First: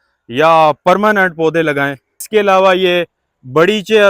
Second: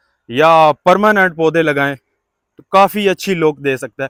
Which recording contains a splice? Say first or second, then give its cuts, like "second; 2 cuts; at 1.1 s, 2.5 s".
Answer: first; 1 cut; at 2.3 s